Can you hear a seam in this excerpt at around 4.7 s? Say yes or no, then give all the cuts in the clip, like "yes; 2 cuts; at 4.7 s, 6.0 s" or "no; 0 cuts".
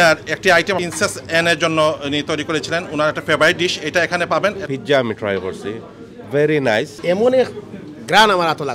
yes; 3 cuts; at 0.8 s, 4.7 s, 7.0 s